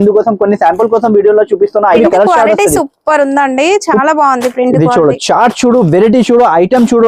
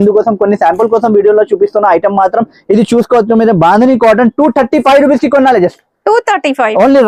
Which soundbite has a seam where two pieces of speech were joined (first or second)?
first